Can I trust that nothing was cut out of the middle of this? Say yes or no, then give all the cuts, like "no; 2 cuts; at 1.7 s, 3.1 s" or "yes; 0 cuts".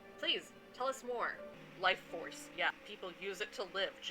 no; 1 cut; at 1.6 s